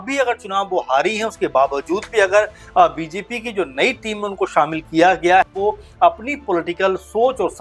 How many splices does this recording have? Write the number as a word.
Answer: one